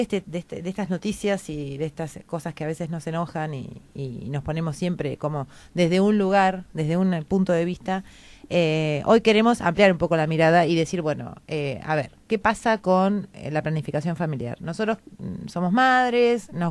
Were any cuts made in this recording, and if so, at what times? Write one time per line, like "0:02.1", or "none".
0:08.7